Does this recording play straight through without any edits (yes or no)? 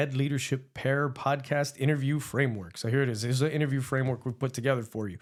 yes